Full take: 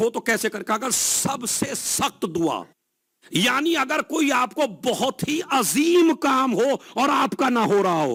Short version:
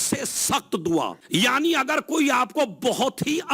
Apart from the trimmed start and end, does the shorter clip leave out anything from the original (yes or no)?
yes